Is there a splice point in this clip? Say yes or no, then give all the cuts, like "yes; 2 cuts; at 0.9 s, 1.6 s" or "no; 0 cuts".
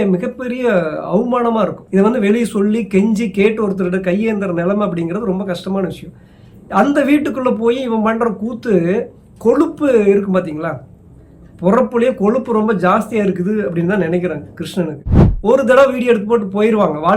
yes; 2 cuts; at 1.8 s, 15.2 s